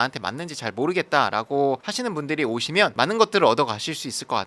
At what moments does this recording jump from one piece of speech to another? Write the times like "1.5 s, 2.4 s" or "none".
none